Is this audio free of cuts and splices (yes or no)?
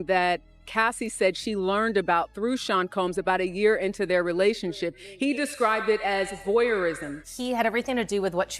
no